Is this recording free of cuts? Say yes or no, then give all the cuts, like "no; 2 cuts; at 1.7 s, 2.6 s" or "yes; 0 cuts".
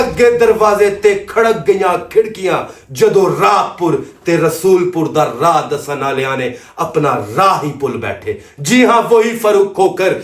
yes; 0 cuts